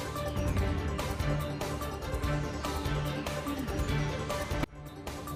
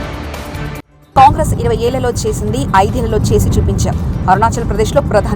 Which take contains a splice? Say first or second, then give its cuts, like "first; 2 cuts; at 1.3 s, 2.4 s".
second; 1 cut; at 0.9 s